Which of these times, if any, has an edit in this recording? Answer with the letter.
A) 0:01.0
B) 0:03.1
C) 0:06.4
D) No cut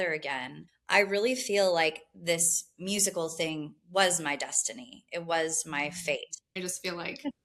C